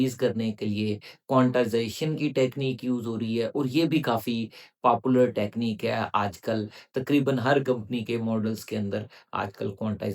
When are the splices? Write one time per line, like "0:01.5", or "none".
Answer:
none